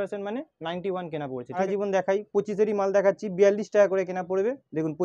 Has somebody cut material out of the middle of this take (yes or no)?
yes